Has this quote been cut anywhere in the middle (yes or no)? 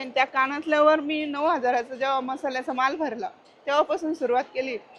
no